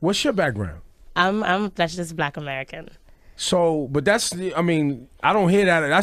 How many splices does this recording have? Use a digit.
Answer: 1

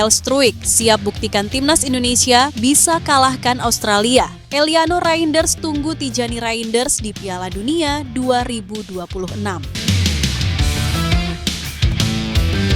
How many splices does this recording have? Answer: 2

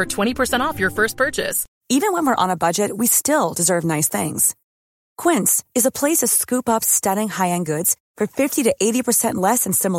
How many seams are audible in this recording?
1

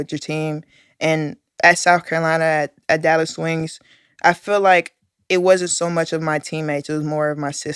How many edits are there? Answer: 0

